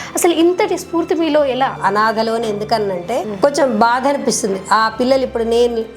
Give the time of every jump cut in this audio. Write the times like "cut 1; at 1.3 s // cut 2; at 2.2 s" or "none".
cut 1; at 1.8 s